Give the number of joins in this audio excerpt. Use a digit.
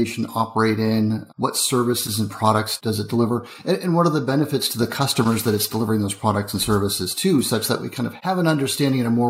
2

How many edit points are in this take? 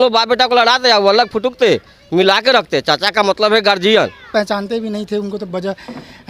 1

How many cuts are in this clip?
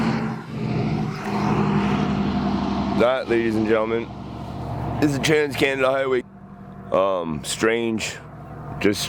1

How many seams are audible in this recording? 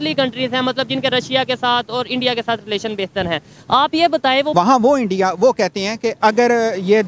2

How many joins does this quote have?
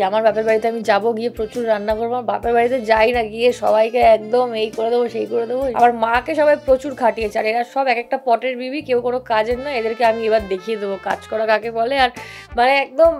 1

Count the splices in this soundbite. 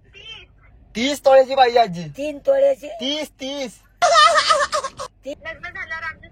1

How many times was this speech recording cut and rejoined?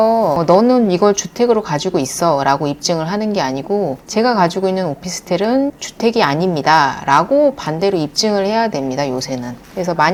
0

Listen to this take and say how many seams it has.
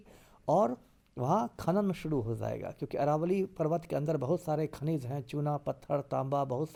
0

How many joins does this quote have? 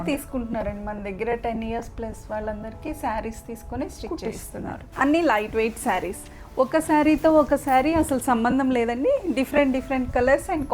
1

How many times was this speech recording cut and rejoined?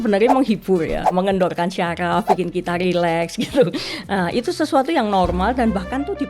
1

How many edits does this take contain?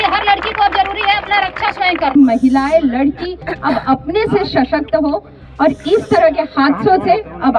1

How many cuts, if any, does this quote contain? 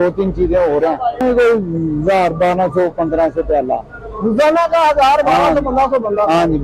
1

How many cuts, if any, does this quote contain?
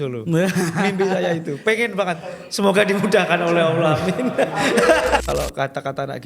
1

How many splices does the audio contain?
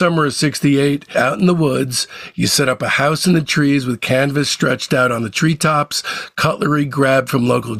1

